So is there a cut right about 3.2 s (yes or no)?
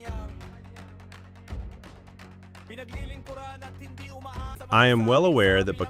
no